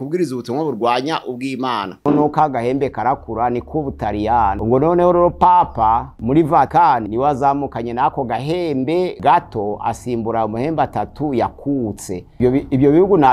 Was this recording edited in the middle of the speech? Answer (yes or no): yes